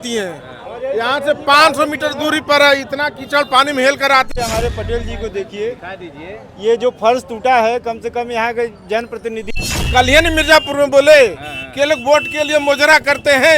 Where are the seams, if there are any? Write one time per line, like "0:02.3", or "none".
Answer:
0:04.3
0:09.5